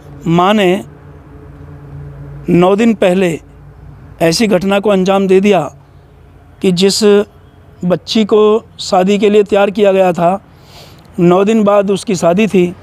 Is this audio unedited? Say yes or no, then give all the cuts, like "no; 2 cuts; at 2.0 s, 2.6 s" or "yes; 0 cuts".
yes; 0 cuts